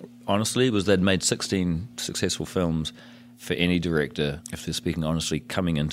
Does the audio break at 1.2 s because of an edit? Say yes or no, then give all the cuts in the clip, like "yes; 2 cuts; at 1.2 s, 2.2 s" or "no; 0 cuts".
no; 2 cuts; at 3.3 s, 4.5 s